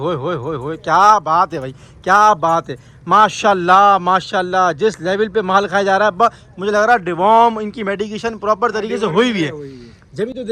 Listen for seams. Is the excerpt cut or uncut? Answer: uncut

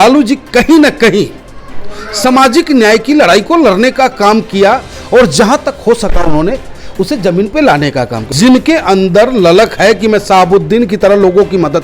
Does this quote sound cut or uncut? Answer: cut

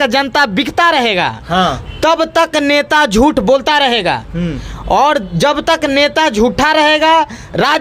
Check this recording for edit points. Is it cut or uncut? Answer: uncut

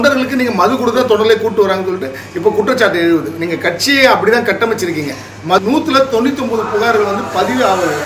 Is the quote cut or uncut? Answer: cut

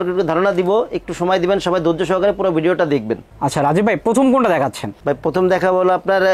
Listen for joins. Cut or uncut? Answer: uncut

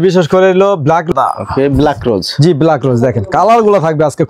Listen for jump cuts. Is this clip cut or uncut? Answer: cut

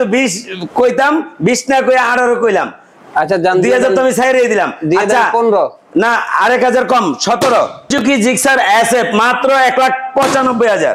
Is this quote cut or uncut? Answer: cut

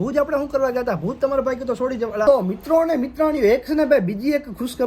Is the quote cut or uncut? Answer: cut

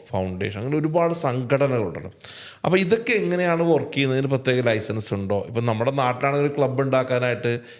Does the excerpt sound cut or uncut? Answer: uncut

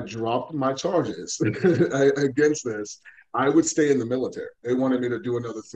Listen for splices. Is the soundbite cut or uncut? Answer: cut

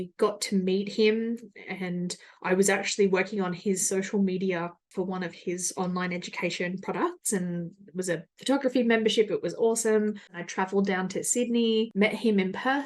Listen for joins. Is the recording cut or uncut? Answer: cut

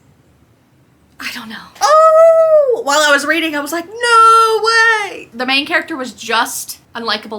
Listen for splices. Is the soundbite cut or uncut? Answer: cut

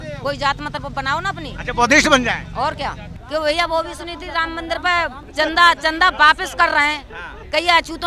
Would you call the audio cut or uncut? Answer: uncut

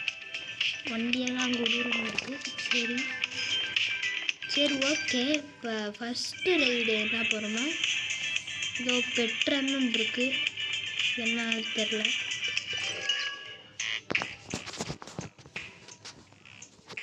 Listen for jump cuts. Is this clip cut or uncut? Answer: uncut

